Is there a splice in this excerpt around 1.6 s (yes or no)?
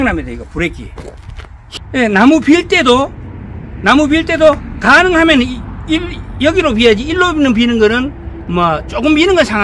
yes